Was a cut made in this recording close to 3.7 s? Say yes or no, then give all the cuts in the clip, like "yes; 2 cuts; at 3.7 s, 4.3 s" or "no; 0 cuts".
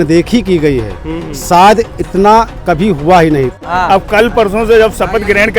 yes; 1 cut; at 3.7 s